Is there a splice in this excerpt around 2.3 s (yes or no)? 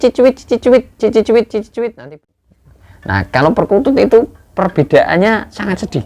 yes